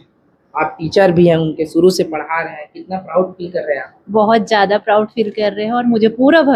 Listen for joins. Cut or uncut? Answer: uncut